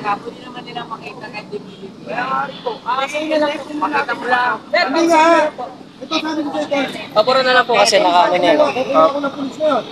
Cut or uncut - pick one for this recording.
uncut